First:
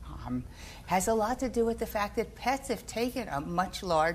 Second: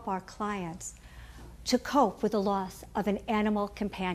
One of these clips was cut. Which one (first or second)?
second